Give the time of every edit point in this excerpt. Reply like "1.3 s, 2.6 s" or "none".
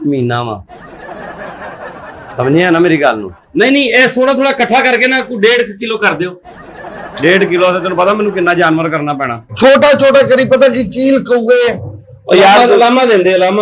3.4 s, 9.4 s